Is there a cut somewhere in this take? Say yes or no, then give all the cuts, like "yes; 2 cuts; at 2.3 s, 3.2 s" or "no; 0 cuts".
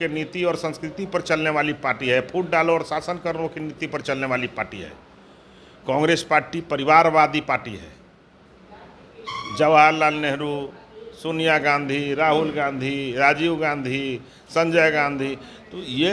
no; 0 cuts